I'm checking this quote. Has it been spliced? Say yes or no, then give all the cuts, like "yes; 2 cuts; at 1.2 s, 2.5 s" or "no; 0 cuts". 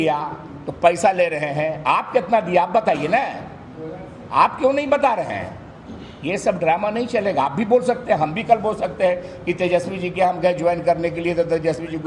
no; 0 cuts